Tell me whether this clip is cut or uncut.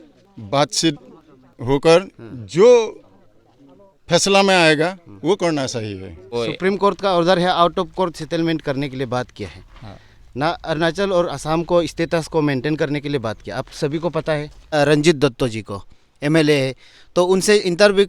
cut